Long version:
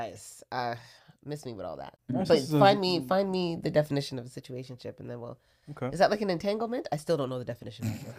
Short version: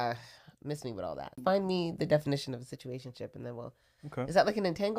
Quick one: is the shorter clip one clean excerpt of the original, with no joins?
no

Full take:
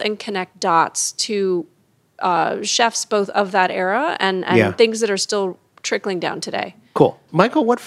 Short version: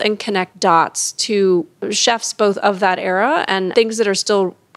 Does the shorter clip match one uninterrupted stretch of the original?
no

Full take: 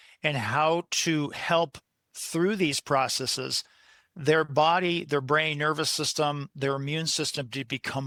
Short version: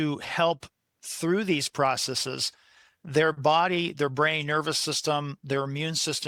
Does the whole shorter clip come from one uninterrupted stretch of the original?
yes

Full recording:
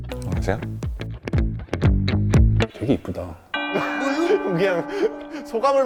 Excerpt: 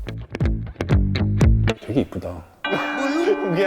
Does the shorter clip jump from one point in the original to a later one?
yes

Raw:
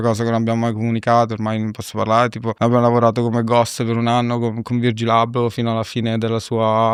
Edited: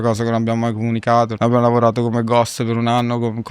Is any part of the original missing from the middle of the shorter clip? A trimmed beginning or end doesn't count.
yes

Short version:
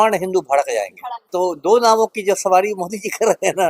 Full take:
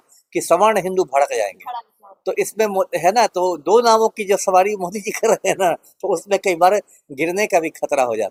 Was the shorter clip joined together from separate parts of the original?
yes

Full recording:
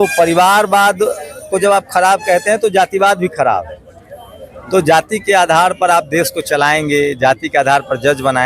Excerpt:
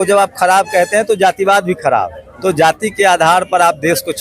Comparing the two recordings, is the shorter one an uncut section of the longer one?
no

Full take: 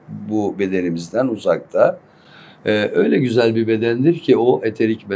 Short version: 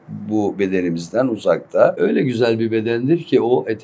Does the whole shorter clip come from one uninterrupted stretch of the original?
no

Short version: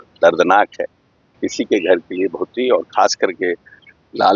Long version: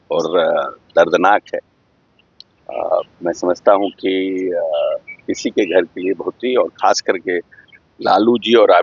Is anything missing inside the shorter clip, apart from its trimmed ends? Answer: yes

